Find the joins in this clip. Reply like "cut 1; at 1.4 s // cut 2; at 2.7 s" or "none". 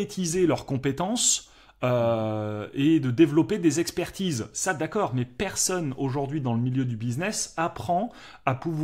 none